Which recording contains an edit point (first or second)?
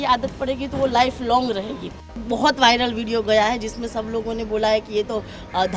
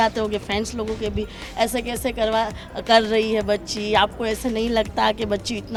first